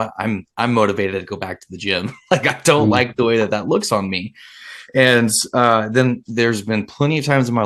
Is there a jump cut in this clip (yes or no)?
no